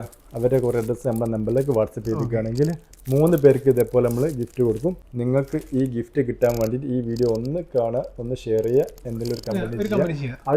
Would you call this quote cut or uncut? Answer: cut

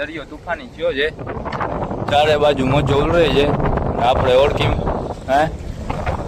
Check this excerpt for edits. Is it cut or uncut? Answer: uncut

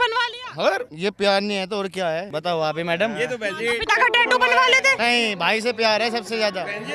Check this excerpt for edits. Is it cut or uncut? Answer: cut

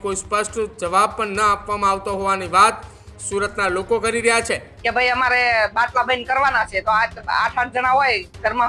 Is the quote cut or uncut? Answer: cut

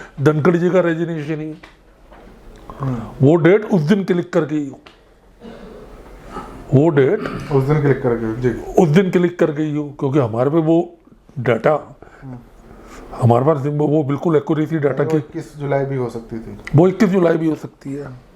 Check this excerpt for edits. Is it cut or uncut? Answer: uncut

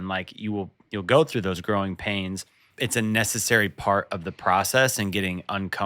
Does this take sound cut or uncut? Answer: cut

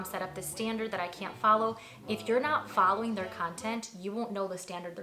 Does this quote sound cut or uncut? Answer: uncut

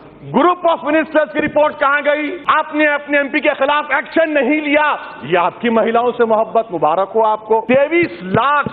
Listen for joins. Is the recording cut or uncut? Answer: cut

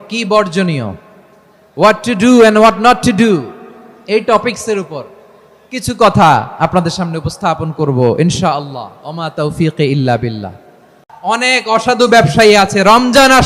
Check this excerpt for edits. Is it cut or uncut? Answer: cut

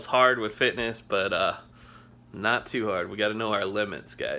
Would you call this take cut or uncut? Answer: uncut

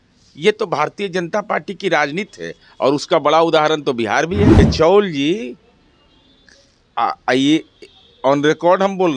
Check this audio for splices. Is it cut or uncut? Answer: cut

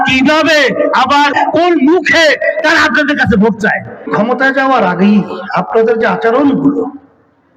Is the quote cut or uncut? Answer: cut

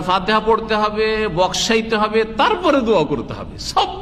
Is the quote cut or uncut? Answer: uncut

